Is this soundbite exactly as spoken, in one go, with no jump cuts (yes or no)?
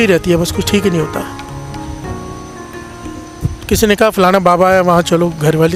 yes